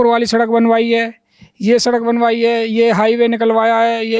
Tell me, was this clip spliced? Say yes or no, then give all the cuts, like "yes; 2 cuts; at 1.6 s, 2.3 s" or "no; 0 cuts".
no; 0 cuts